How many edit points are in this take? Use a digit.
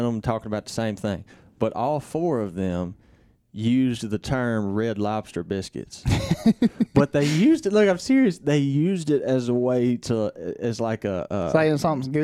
0